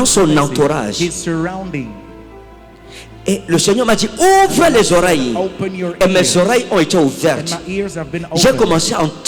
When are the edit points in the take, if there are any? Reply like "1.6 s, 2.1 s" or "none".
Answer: none